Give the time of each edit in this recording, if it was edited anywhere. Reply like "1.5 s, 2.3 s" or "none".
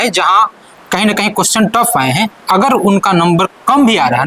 none

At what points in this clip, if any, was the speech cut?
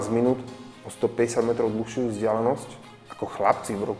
none

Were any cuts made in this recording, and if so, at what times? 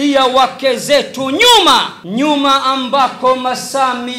2.0 s

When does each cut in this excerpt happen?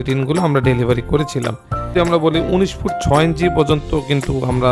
1.9 s

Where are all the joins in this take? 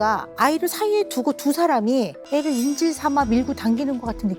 2.2 s

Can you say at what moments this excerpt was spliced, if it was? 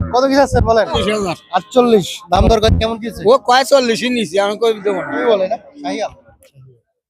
1.0 s, 5.2 s

